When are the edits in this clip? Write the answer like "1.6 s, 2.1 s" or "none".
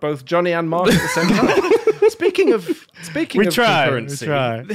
none